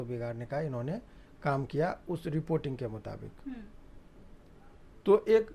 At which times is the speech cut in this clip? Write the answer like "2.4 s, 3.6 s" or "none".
none